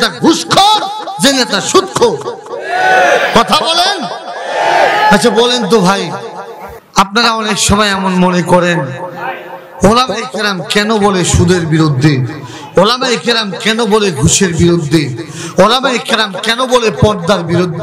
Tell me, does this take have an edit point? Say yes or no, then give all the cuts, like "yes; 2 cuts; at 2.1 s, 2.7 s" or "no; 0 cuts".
no; 0 cuts